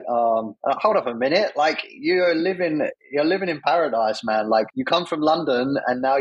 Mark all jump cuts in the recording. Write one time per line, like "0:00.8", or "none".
0:00.7
0:02.9
0:04.9